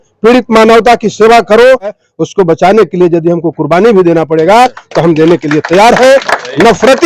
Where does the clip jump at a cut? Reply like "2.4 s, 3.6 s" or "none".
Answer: 2.0 s